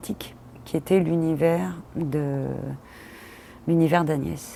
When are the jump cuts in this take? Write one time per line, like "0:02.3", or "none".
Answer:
none